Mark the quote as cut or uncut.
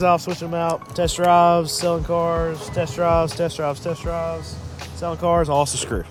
uncut